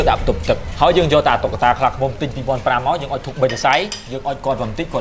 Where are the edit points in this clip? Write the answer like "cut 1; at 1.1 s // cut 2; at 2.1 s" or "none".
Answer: cut 1; at 4.0 s